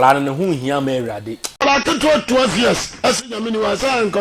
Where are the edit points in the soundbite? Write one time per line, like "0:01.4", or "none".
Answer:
0:01.5